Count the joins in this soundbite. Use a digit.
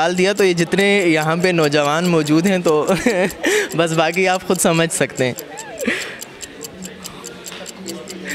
0